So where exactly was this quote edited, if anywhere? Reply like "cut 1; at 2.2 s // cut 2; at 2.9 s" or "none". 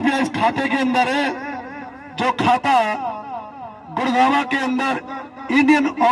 none